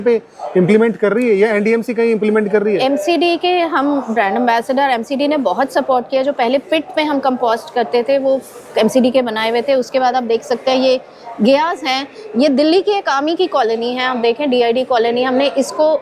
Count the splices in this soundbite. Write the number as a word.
zero